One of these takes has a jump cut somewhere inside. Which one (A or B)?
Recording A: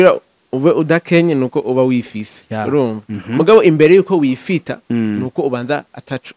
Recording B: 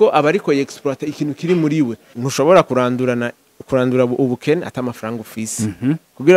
B